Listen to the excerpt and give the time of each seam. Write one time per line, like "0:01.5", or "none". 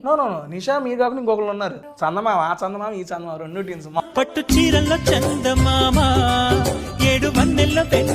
0:01.8
0:04.0